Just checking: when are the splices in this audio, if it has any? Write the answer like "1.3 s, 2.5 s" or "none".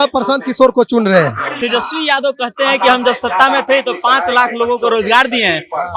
1.6 s